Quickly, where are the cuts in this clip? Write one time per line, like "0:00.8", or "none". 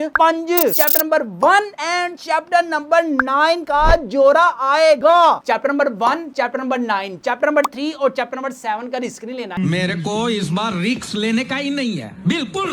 0:00.7
0:05.4